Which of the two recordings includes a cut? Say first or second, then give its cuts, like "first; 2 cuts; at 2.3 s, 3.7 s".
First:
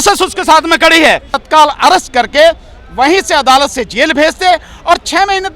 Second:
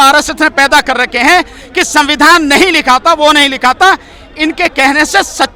first; 1 cut; at 1.4 s